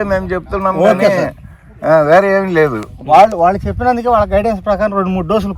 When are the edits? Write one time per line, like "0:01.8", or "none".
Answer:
none

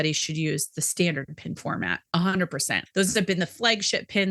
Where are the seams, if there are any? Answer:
0:02.7

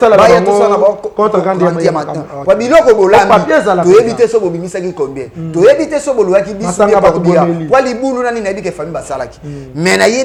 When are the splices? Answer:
none

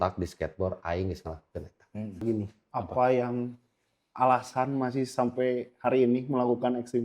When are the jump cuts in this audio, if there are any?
0:02.2

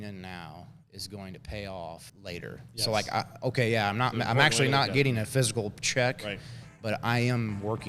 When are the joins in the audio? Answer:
0:02.1

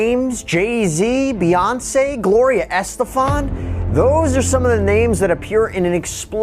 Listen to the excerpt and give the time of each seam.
none

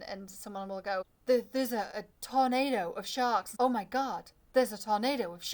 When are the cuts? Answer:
0:01.1
0:03.5

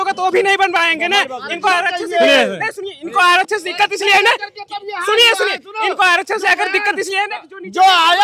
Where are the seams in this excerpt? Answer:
none

